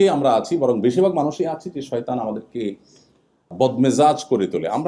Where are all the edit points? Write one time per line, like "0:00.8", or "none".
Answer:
0:03.5